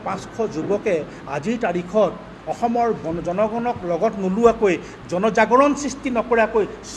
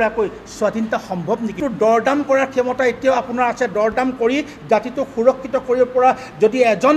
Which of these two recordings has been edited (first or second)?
second